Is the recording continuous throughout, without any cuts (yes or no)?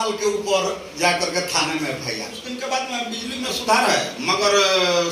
no